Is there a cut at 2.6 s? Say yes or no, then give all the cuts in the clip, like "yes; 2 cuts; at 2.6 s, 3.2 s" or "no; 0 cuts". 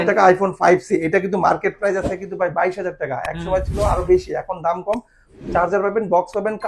no; 0 cuts